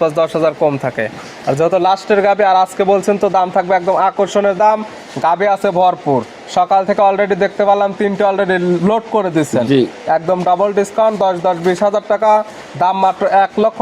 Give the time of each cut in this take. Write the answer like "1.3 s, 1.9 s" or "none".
none